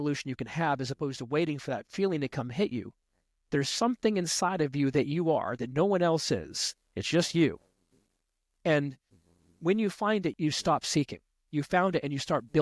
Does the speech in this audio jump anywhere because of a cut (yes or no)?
yes